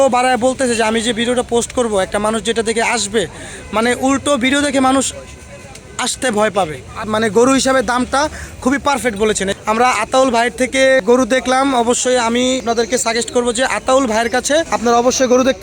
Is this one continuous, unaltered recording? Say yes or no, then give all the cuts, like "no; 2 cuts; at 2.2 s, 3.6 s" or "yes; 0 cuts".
no; 5 cuts; at 7.1 s, 9.6 s, 11.0 s, 12.6 s, 14.7 s